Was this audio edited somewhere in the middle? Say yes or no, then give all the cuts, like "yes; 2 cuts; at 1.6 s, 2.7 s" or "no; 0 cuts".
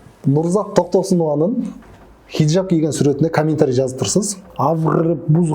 yes; 1 cut; at 4.4 s